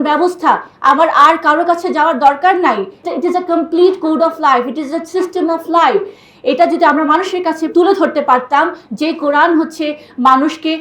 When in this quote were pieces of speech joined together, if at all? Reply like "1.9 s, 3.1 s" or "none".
3.0 s